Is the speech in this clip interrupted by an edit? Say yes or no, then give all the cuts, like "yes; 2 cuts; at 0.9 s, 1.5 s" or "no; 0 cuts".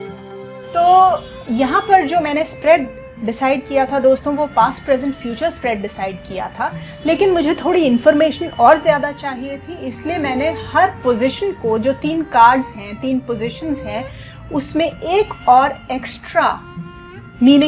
no; 0 cuts